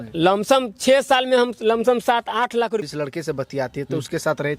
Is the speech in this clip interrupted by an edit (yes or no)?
yes